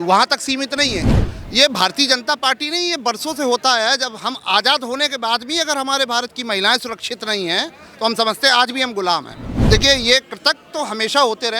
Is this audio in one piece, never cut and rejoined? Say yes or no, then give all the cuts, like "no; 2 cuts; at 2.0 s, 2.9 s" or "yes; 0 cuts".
no; 2 cuts; at 1.0 s, 9.5 s